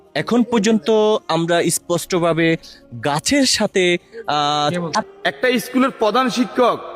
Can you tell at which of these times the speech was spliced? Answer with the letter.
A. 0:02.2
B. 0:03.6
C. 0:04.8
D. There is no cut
C